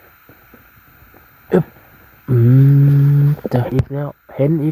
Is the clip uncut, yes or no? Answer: no